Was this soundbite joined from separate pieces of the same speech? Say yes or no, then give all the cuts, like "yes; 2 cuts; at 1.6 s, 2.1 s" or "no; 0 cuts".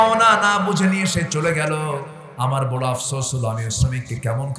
no; 0 cuts